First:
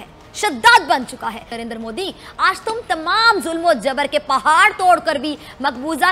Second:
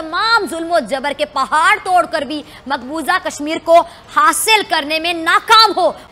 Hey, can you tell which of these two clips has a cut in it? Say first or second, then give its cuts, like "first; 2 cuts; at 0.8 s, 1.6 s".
first; 1 cut; at 1.4 s